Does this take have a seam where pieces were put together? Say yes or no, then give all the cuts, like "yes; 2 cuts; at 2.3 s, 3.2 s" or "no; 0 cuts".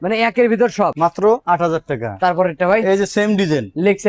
yes; 1 cut; at 1.2 s